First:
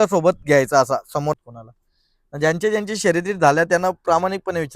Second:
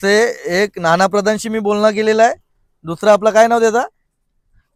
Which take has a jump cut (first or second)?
first